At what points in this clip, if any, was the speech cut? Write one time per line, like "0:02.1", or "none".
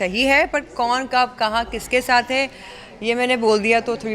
none